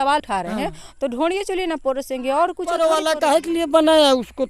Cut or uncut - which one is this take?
cut